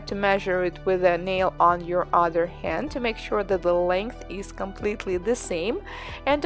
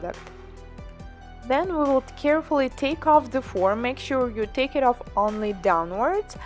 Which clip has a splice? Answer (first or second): first